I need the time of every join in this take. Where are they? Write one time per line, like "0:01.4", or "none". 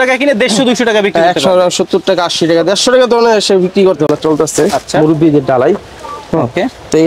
0:04.1